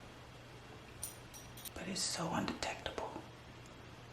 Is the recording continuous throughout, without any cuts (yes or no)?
no